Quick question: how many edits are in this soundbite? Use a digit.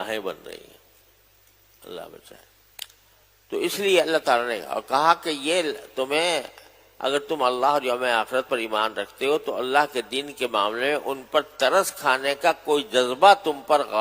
1